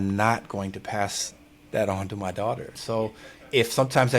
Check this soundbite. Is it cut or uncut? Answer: cut